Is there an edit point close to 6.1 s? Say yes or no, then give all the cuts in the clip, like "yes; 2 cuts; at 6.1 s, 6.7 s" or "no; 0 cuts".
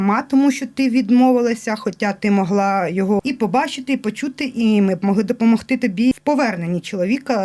yes; 2 cuts; at 3.2 s, 6.1 s